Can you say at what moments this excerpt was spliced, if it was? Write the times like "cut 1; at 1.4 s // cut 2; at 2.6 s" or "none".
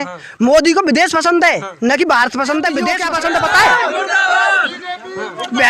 cut 1; at 3.0 s